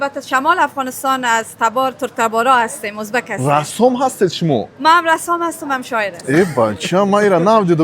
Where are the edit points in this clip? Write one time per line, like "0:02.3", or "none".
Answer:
0:06.1